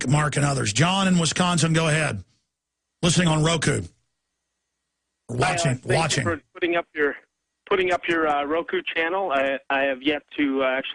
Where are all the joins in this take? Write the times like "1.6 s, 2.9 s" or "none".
none

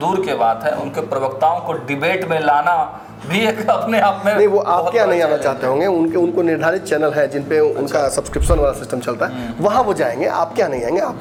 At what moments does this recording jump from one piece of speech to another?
none

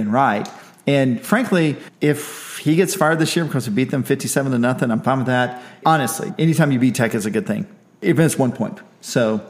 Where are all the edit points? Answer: 1.9 s, 5.8 s, 8.0 s

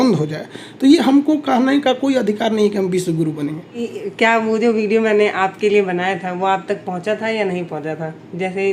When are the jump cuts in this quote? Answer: 3.9 s

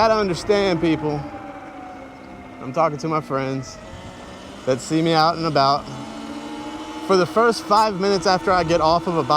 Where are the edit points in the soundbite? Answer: none

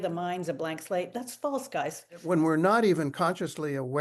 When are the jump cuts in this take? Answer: 2.2 s

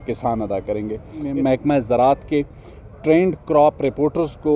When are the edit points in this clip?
1.3 s

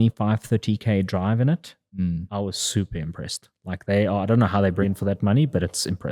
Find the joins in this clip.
4.8 s

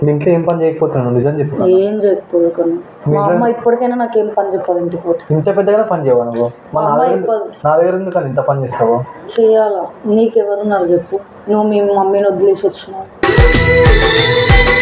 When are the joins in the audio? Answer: none

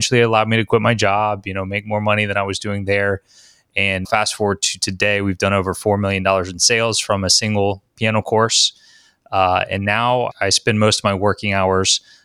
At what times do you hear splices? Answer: 4.1 s, 10.3 s

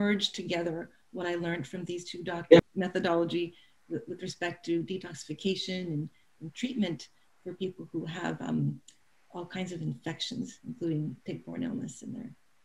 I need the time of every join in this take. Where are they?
2.6 s

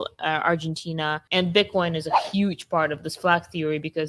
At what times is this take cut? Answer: 1.2 s

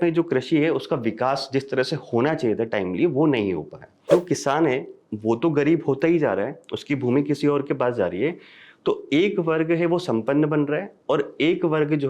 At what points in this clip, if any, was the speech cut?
4.1 s

